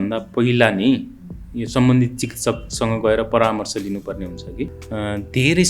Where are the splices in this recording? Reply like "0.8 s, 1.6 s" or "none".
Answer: 4.7 s

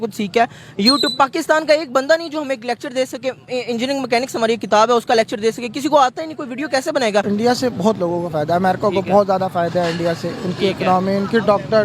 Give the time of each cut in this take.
7.3 s

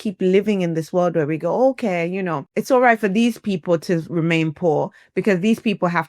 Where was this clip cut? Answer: 2.5 s

